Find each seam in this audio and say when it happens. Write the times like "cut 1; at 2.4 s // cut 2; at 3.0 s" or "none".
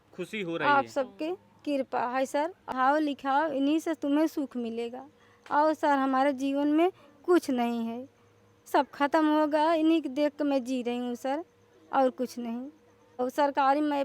cut 1; at 2.7 s // cut 2; at 13.2 s